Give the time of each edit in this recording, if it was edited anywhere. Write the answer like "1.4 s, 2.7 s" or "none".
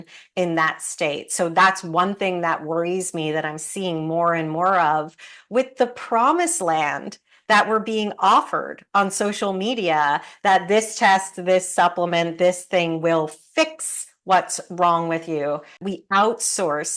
15.9 s